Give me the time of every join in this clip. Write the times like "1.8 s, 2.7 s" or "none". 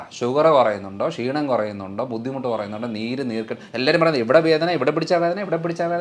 none